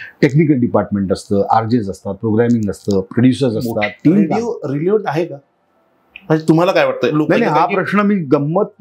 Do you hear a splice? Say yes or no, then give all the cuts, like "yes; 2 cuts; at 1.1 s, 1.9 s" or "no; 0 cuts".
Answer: yes; 2 cuts; at 4.3 s, 7.1 s